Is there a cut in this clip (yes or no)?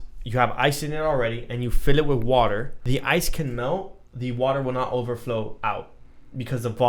yes